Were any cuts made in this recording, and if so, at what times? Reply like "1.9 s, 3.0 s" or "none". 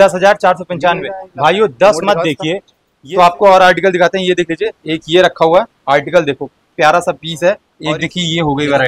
3.0 s, 7.7 s